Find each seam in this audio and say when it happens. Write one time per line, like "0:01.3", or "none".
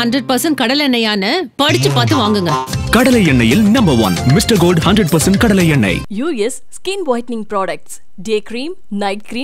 none

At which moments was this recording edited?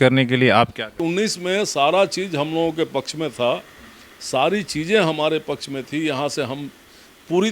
0:01.0

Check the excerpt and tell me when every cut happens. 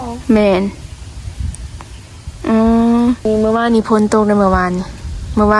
0:03.2

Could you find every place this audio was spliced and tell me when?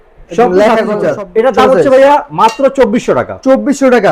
0:01.0

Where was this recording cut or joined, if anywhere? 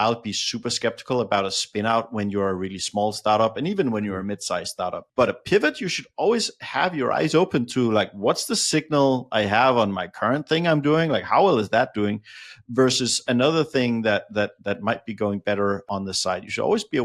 none

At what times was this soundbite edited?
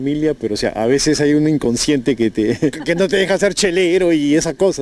0:02.8

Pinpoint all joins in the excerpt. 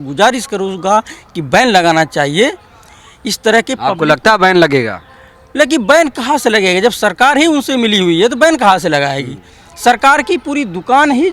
none

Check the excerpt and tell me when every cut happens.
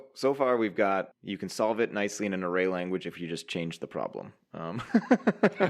0:01.2

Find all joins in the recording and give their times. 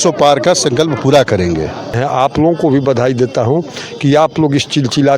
0:02.0

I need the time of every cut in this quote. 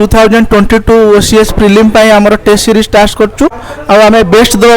0:03.7

